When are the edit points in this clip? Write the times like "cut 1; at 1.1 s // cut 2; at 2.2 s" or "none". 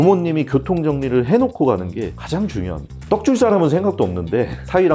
cut 1; at 3.0 s